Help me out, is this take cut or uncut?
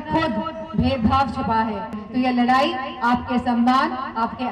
cut